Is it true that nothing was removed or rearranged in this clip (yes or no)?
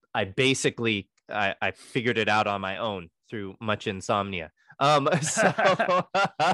yes